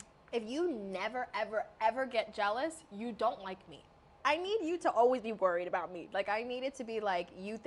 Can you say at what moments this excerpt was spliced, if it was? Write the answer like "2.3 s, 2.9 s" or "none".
4.1 s